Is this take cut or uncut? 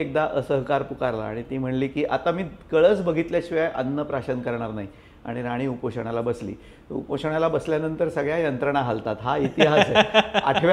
uncut